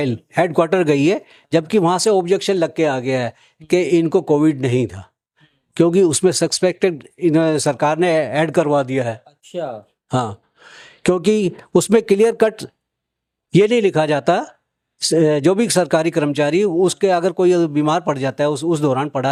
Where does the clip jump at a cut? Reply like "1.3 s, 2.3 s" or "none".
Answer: none